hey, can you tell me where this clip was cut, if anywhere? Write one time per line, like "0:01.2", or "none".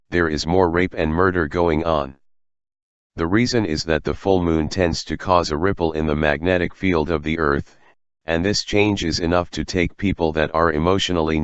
0:02.0